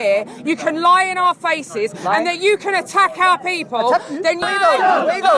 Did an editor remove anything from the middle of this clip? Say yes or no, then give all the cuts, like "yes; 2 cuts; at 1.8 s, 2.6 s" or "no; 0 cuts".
yes; 1 cut; at 4.4 s